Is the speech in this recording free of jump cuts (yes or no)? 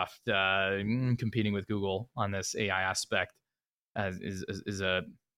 yes